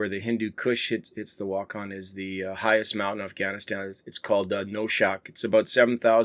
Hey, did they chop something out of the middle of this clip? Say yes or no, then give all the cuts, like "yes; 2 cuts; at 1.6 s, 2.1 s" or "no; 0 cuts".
no; 0 cuts